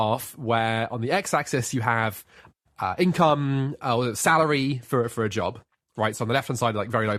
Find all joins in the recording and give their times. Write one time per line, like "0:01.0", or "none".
none

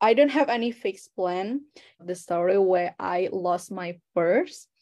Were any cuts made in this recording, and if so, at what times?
0:02.0

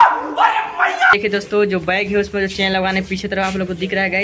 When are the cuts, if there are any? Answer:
0:01.1

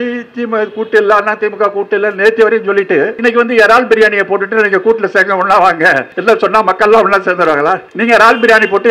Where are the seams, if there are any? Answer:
0:03.1
0:06.1
0:07.9

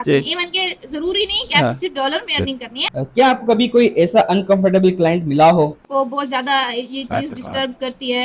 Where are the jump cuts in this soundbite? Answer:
0:02.7
0:05.8

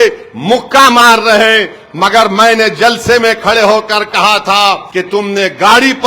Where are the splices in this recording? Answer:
0:04.9

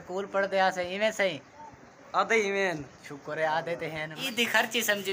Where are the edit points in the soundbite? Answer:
0:04.1

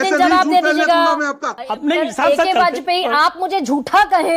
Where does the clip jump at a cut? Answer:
0:01.6

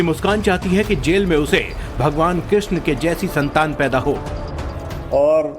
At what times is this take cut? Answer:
0:02.8

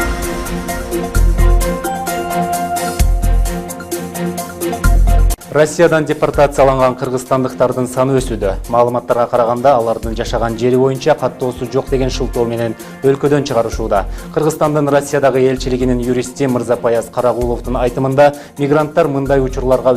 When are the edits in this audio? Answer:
0:02.0

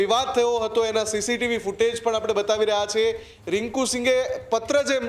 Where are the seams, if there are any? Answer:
0:03.3

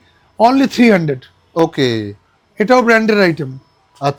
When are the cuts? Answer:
none

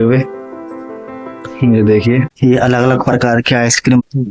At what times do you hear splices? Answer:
0:02.3

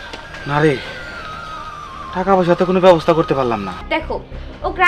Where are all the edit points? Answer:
0:03.8

